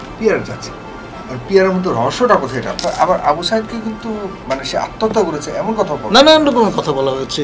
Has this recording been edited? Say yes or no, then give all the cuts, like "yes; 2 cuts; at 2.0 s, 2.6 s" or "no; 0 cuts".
yes; 1 cut; at 2.7 s